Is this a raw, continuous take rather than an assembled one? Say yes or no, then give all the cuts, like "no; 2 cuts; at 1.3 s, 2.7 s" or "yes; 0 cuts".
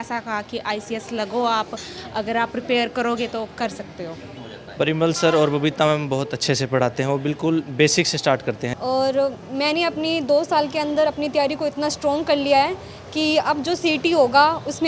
no; 2 cuts; at 4.3 s, 8.7 s